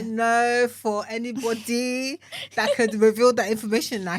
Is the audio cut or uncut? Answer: uncut